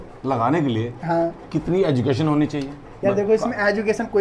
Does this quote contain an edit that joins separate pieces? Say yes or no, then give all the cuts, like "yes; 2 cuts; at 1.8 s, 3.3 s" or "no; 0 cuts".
no; 0 cuts